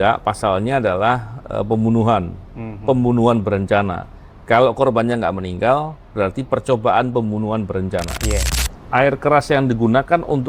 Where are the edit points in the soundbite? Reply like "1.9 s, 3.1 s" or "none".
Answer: 8.5 s